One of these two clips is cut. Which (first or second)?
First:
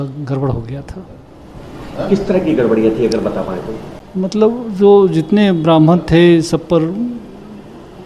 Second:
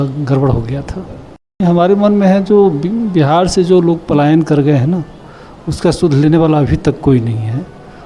second